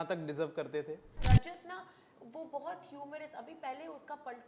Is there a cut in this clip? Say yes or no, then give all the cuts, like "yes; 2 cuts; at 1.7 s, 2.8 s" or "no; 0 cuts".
yes; 1 cut; at 1.2 s